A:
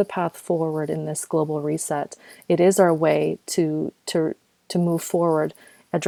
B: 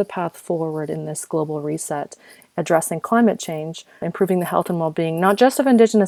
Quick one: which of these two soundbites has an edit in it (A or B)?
B